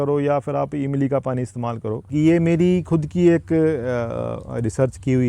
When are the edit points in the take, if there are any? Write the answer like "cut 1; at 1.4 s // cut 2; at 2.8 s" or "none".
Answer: cut 1; at 2.1 s